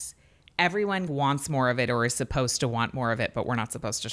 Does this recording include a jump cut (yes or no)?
yes